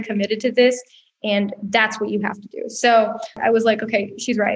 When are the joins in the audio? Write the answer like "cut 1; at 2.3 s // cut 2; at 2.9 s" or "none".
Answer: cut 1; at 3.4 s